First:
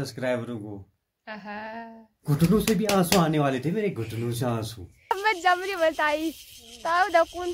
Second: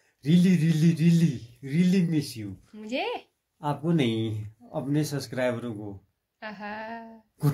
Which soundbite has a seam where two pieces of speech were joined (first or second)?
first